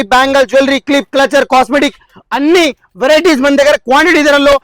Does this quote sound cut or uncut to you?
uncut